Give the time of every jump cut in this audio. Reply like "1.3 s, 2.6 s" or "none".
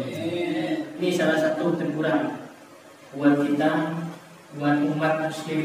1.0 s

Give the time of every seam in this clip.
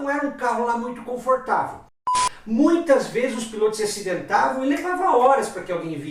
2.2 s

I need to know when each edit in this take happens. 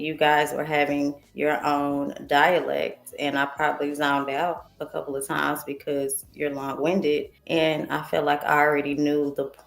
1.2 s, 4.7 s, 7.4 s

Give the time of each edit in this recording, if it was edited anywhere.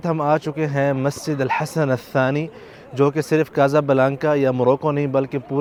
none

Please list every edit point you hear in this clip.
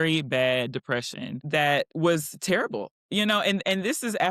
none

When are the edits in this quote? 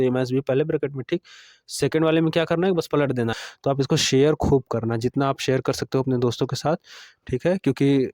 3.3 s

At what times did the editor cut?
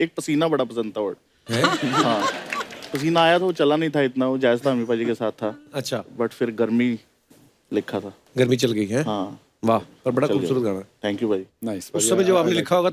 none

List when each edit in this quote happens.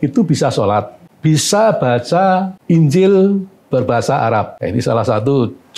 1.0 s, 2.5 s, 4.5 s

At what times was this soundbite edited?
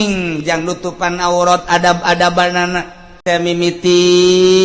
3.2 s

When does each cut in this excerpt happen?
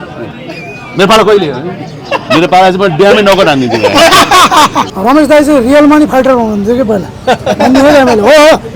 4.8 s

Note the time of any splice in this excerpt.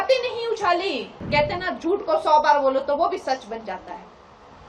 1.2 s

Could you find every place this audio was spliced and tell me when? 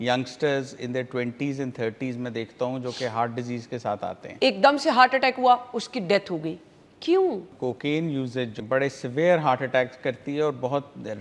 4.2 s, 7.5 s, 8.6 s

